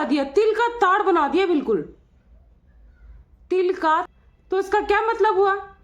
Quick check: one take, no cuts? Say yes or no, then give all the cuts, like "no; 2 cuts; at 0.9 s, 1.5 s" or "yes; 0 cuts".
no; 1 cut; at 4.1 s